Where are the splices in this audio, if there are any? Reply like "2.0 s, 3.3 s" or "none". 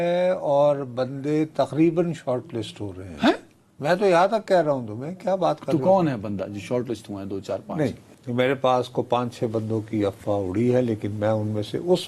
none